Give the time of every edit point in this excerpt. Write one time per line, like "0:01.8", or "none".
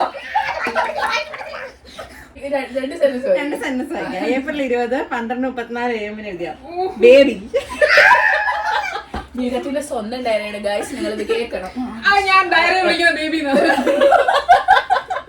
0:02.4